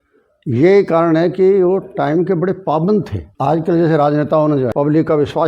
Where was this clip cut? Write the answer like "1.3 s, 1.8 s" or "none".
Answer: 3.2 s, 4.7 s